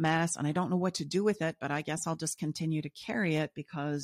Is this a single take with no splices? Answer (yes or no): yes